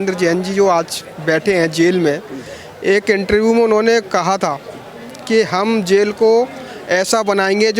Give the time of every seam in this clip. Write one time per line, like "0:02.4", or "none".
none